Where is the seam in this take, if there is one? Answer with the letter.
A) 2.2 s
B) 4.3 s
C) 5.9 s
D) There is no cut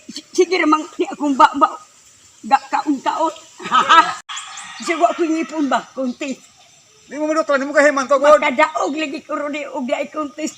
B